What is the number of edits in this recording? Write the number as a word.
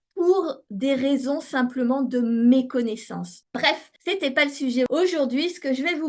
two